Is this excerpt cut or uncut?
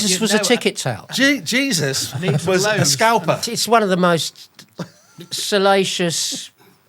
cut